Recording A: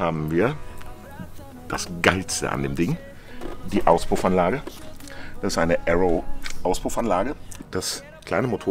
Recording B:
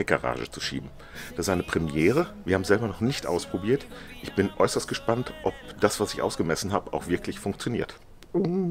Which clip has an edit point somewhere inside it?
A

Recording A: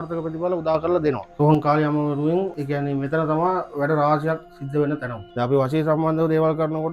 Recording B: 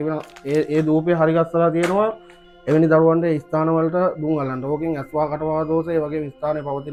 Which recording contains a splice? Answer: A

